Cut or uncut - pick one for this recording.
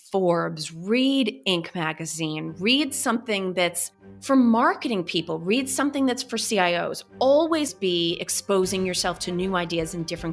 uncut